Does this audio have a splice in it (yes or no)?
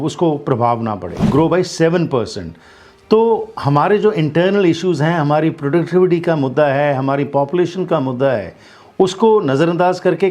yes